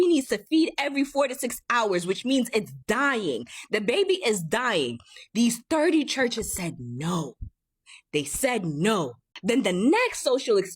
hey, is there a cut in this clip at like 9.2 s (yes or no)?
yes